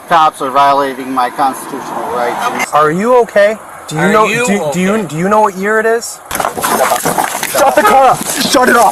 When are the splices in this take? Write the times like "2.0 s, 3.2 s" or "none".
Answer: 2.6 s, 6.2 s